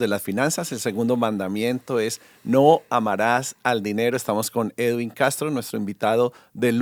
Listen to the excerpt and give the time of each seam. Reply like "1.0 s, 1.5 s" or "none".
none